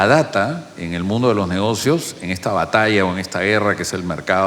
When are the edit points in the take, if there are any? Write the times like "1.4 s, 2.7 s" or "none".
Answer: none

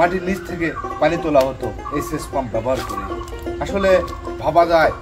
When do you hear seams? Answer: none

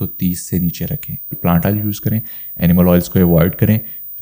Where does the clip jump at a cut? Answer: 1.4 s

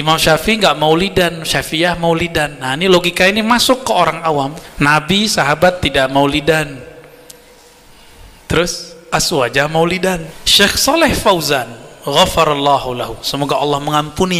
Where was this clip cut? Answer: 4.6 s, 10.4 s

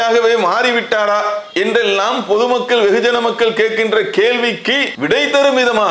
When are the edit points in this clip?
4.9 s

